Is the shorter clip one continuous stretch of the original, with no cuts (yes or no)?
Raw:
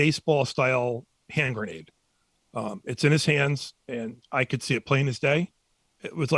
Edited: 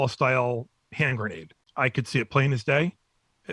no